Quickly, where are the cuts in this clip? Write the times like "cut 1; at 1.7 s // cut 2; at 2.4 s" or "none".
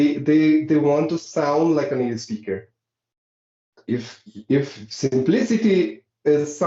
none